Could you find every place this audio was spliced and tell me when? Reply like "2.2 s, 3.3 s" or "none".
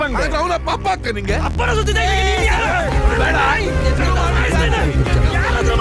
3.2 s